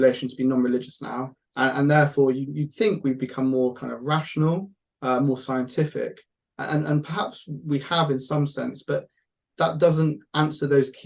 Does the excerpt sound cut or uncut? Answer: uncut